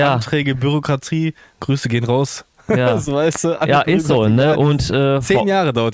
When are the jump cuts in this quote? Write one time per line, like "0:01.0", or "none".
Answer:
none